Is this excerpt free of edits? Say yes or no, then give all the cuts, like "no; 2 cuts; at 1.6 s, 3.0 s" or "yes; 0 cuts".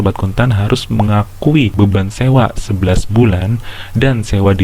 no; 1 cut; at 1.7 s